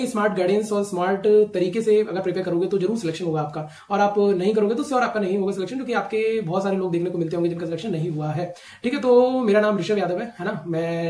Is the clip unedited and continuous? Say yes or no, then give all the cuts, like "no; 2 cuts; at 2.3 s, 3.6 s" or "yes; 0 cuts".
yes; 0 cuts